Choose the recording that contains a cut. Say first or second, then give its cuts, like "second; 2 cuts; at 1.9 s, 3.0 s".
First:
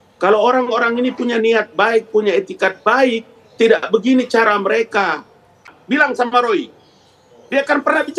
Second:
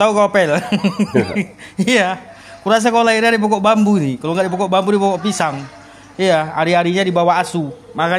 first; 1 cut; at 5.7 s